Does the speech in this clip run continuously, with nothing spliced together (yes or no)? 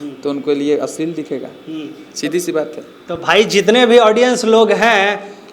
yes